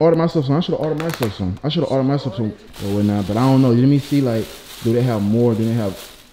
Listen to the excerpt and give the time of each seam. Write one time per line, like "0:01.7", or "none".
0:02.7